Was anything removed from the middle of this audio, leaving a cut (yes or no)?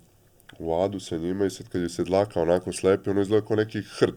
no